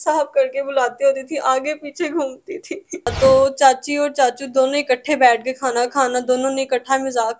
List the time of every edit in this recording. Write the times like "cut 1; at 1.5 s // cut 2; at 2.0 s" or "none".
cut 1; at 3.1 s